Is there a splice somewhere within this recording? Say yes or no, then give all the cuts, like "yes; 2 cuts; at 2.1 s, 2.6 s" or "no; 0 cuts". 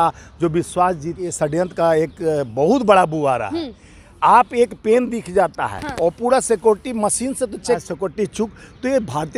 yes; 2 cuts; at 1.6 s, 7.8 s